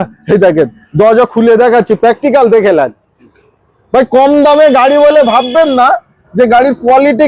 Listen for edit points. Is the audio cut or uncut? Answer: uncut